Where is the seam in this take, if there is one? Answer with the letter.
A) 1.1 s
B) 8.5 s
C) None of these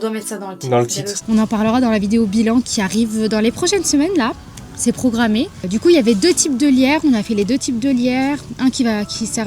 A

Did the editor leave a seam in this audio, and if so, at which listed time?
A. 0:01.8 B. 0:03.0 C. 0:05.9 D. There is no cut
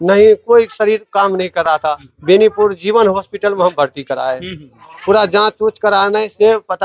A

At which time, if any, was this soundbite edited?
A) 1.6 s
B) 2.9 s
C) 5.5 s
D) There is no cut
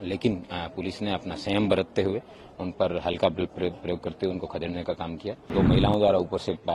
C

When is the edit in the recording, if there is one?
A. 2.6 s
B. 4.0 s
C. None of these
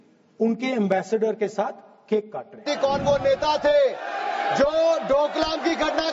A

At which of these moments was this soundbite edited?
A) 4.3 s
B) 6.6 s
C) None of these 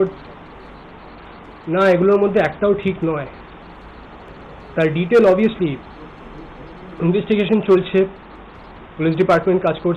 A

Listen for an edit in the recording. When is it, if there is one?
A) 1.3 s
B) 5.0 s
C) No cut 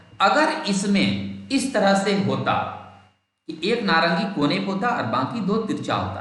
C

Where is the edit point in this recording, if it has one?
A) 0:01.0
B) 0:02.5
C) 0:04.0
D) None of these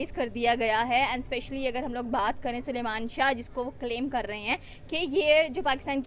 D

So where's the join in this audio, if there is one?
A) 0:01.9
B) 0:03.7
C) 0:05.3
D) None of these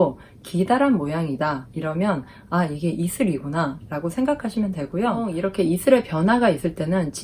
C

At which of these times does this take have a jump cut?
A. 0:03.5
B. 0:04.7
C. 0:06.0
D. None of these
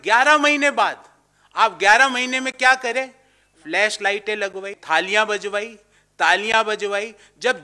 B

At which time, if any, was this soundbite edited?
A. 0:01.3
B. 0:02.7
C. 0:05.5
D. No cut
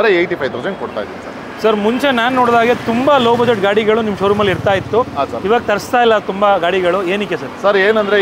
D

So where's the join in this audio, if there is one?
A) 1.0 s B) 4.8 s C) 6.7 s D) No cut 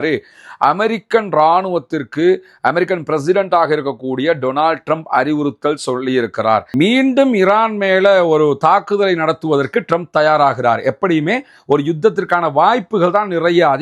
C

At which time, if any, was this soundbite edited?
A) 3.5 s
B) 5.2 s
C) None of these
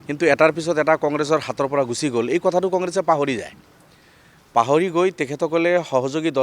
C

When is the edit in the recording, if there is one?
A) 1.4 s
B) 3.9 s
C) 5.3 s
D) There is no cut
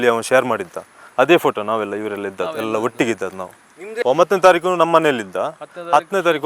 B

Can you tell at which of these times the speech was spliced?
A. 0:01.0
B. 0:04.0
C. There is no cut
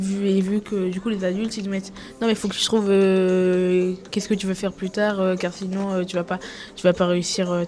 C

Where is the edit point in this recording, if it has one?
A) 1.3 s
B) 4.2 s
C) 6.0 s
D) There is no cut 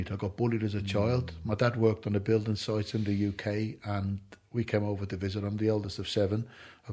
D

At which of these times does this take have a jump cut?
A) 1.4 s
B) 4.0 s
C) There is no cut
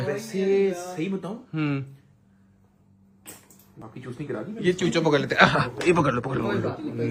C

